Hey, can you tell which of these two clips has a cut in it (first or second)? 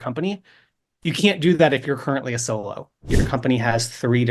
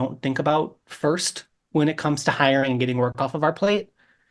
first